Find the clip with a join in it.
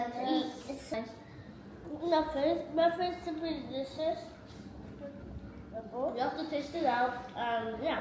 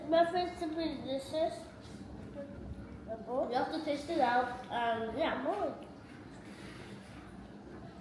first; 1 cut; at 0.9 s

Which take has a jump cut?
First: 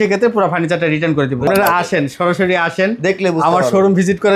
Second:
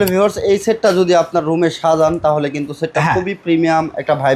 first; 1 cut; at 1.5 s

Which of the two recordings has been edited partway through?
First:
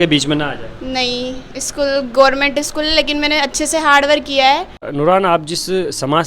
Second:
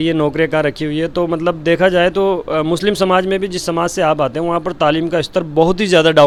first; 1 cut; at 4.9 s

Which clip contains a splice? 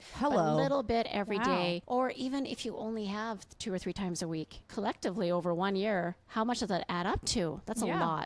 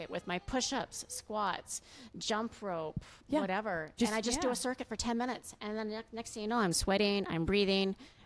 first; 2 cuts; at 1.8 s, 4.7 s

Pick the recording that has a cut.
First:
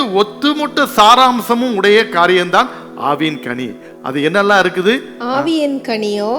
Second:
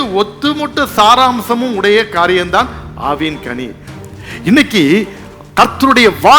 second; 1 cut; at 3.9 s

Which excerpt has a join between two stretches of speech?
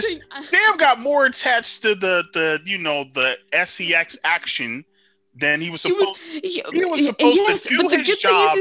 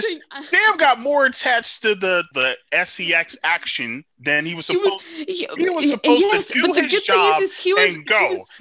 second; 2 cuts; at 2.3 s, 4.1 s

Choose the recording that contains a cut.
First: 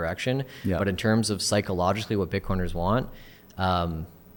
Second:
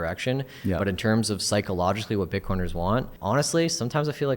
second; 1 cut; at 3.1 s

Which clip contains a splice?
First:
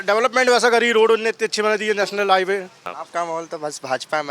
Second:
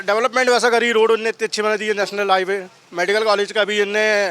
first; 1 cut; at 2.9 s

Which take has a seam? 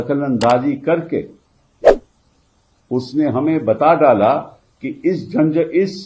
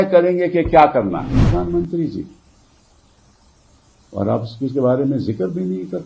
second; 1 cut; at 1.4 s

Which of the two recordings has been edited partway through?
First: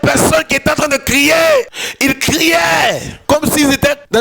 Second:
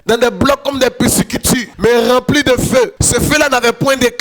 first; 2 cuts; at 1.8 s, 3.1 s

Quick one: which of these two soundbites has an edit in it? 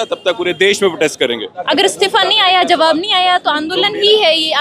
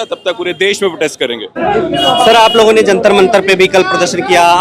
first; 1 cut; at 1.5 s

